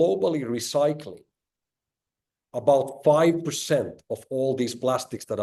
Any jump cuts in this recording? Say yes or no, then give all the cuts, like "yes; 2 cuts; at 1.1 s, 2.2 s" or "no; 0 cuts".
no; 0 cuts